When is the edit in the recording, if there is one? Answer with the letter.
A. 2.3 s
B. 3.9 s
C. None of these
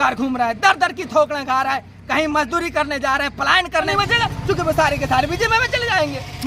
B